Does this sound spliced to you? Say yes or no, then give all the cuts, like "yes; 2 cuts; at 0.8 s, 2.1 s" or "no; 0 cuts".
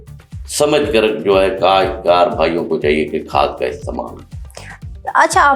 no; 0 cuts